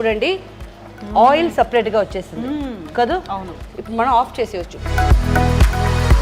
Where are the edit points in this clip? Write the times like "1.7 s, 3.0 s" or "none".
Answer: 4.8 s